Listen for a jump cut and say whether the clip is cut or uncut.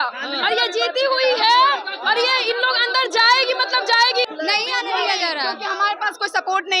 cut